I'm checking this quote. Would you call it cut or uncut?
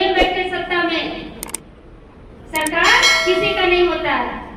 uncut